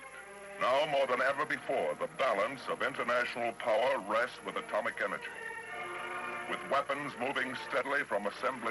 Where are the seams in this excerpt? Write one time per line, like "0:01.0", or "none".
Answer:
0:04.1